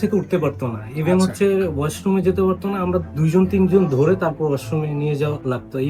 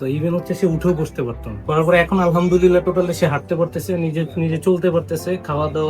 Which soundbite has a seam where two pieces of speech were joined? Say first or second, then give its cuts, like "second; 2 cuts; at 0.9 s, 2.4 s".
second; 1 cut; at 1.6 s